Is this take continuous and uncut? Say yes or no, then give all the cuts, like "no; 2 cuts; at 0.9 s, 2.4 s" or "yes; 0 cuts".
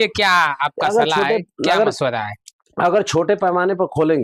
yes; 0 cuts